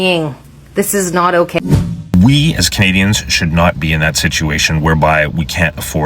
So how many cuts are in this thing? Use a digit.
1